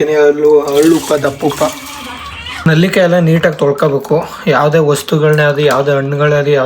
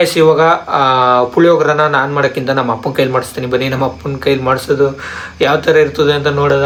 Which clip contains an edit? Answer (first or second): first